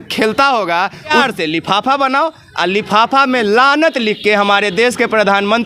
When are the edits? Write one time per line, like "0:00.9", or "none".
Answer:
0:01.2